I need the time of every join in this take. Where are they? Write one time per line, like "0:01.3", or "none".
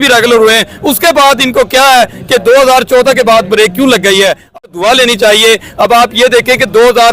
0:04.4